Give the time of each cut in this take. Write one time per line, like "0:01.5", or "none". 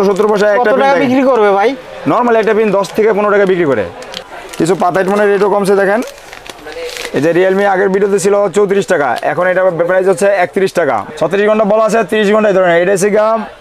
0:04.2
0:11.0